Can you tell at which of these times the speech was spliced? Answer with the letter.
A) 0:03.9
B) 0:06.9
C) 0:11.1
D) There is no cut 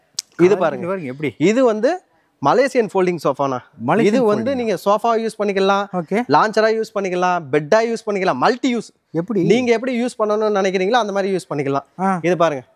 D